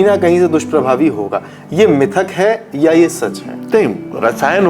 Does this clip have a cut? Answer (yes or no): no